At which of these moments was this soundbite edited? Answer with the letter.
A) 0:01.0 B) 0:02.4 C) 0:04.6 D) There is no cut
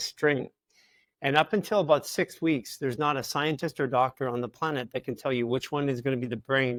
D